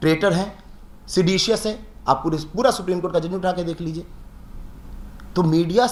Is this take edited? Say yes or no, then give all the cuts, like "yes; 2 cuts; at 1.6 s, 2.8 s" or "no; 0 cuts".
no; 0 cuts